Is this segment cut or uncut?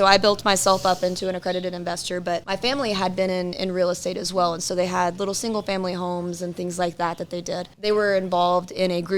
cut